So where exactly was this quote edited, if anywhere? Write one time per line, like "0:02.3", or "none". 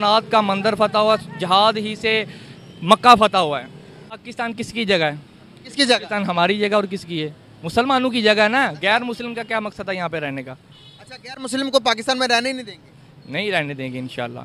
0:04.2